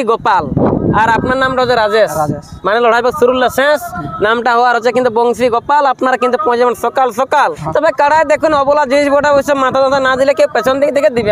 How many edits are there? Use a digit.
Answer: 1